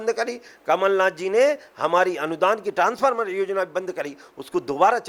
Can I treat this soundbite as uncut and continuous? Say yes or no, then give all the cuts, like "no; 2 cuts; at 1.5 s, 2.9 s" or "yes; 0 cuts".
yes; 0 cuts